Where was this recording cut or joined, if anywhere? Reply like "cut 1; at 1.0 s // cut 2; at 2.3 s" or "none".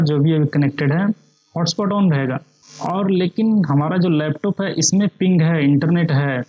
cut 1; at 2.5 s